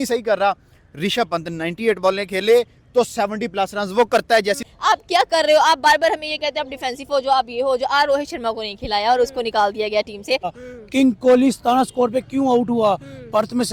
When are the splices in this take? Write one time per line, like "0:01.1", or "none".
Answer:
0:04.7
0:10.5